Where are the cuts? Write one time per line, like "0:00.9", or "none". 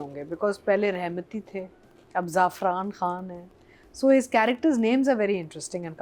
none

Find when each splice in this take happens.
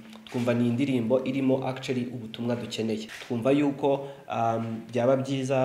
0:03.1

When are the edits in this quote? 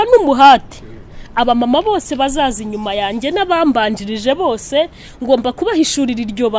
none

